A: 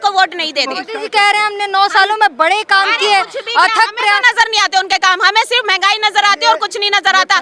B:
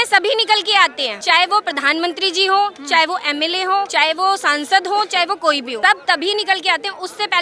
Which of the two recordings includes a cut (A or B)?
B